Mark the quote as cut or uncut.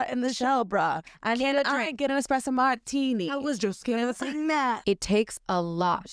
cut